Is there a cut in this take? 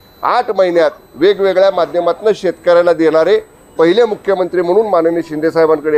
no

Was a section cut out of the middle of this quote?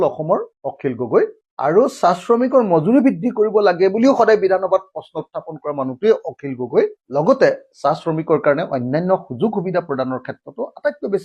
yes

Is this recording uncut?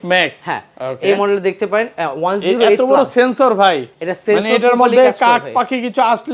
yes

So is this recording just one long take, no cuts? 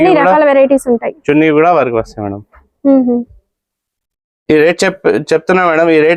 yes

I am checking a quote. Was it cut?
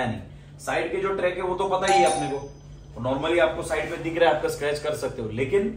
no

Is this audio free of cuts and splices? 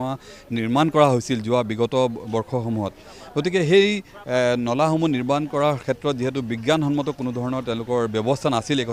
yes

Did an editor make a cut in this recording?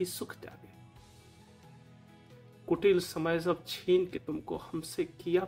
no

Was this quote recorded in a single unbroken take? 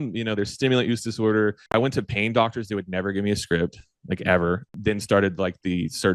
no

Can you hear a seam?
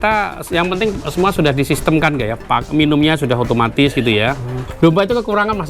yes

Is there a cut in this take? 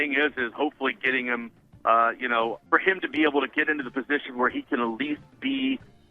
yes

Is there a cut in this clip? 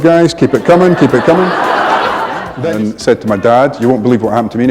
yes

